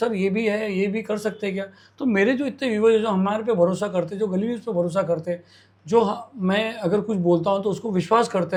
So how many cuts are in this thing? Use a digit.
0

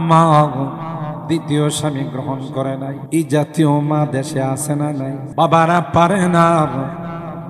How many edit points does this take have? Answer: 2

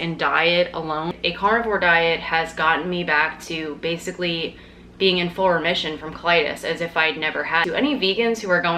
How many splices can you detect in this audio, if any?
2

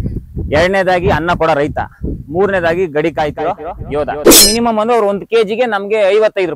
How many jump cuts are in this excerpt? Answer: 1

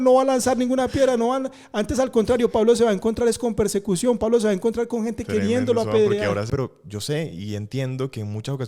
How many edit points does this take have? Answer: 1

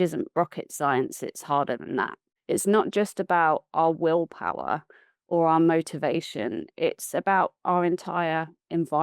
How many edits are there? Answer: 1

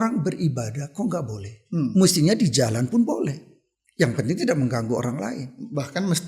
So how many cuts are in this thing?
0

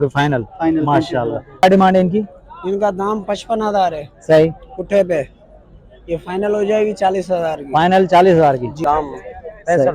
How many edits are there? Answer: 2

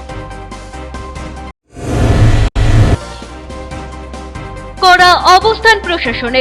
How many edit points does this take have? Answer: 1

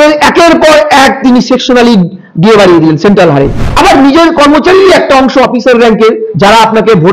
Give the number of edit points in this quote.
1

